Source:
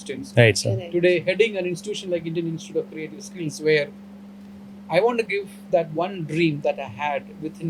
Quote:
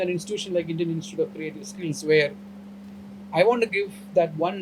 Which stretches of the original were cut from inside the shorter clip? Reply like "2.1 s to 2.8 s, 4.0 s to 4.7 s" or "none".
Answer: none